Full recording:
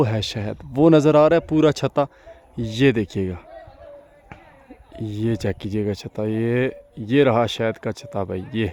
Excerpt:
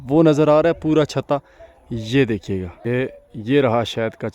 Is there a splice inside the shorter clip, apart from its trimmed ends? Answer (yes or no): yes